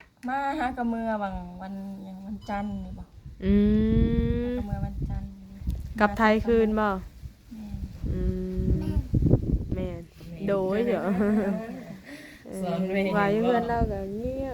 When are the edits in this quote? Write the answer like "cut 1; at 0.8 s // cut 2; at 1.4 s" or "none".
none